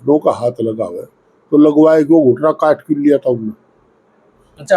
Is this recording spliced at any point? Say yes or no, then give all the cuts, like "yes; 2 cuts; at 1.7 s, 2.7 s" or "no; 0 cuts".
no; 0 cuts